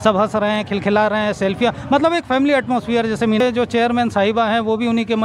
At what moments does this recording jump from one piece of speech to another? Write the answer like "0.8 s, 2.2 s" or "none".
3.4 s